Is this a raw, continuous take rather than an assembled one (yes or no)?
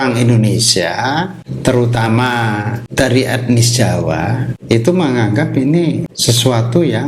no